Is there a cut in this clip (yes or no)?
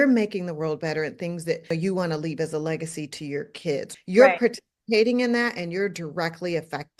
yes